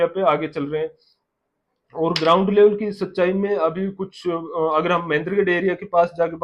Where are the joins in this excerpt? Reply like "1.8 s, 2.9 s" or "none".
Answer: none

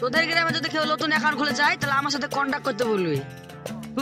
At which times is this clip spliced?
none

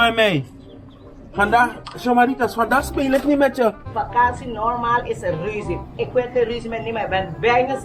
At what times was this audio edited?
3.8 s

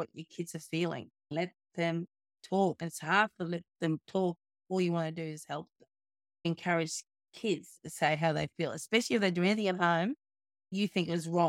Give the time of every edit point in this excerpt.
1.3 s, 2.8 s, 6.5 s, 10.7 s

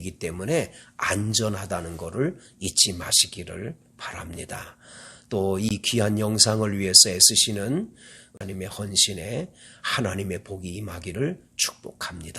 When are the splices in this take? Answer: 8.5 s

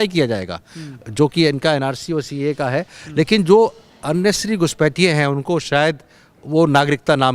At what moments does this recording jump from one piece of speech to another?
none

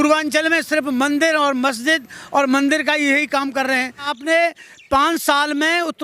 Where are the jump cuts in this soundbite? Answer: 4.1 s

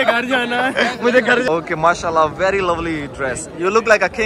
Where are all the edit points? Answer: 1.5 s

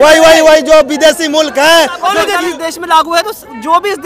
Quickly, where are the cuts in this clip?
2.3 s

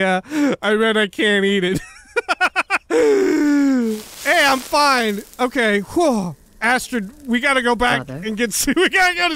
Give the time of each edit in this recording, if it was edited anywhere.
4.1 s, 6.5 s

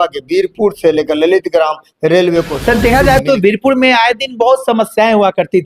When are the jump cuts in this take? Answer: 2.5 s

